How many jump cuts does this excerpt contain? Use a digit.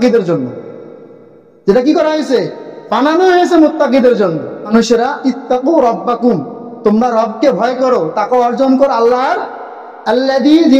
1